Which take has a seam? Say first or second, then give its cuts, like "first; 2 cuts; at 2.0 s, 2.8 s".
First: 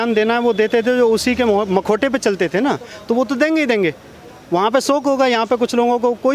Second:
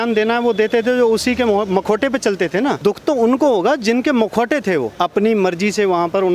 second; 2 cuts; at 2.8 s, 4.9 s